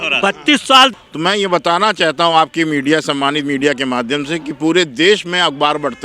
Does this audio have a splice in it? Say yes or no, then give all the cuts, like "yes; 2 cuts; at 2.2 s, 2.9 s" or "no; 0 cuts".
yes; 1 cut; at 0.9 s